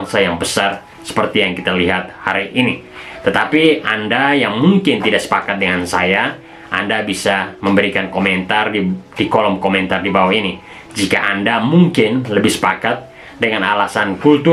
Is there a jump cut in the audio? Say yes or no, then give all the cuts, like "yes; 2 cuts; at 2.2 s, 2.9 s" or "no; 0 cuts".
no; 0 cuts